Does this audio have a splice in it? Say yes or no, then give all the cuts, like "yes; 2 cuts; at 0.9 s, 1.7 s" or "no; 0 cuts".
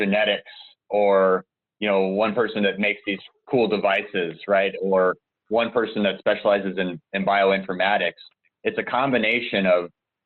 no; 0 cuts